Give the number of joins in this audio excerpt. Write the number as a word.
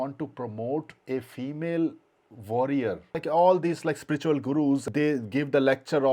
two